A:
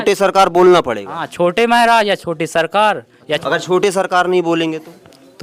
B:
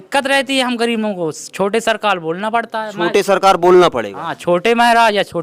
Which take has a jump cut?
A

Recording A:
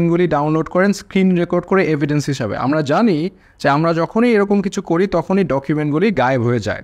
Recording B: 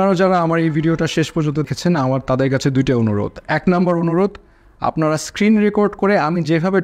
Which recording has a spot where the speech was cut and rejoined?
B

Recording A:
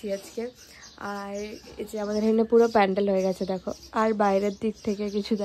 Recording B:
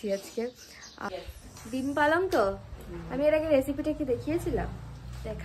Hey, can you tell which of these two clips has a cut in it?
B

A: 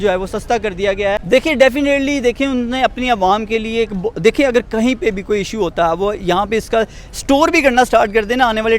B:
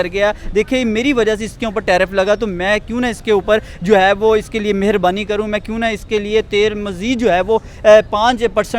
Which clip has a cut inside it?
A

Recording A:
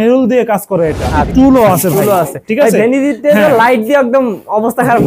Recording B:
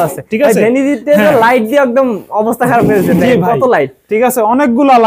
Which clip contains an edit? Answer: A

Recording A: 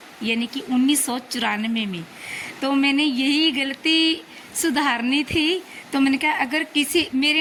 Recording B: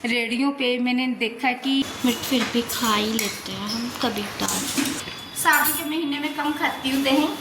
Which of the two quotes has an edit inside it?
B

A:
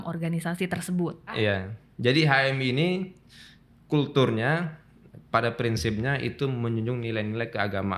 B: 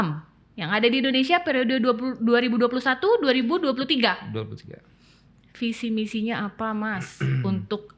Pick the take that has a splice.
A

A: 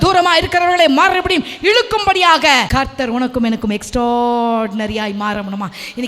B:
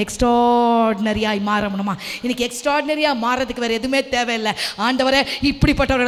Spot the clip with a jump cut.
A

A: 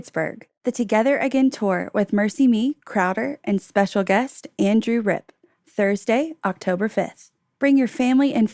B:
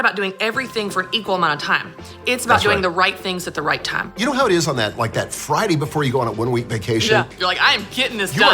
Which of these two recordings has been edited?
B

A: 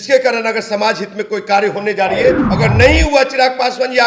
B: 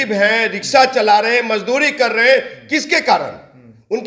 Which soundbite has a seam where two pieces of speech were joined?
A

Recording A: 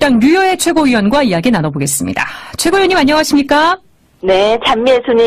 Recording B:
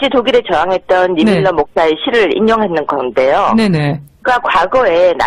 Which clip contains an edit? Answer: B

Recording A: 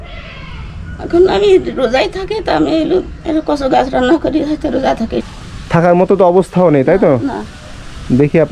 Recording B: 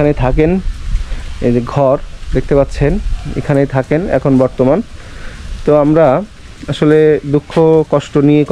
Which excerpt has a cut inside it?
A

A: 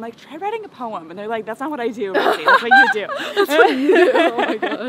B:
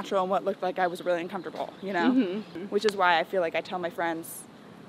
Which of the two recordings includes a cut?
B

